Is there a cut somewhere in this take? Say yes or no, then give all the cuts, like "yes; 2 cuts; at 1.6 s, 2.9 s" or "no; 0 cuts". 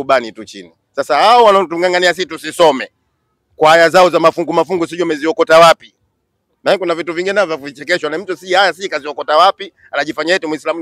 no; 0 cuts